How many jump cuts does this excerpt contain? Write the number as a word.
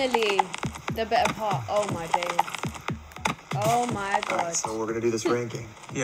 zero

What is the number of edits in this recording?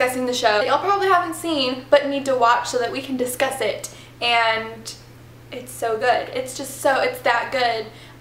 zero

